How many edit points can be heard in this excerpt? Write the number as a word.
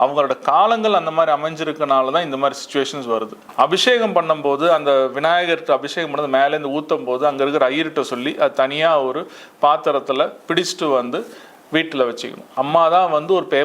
two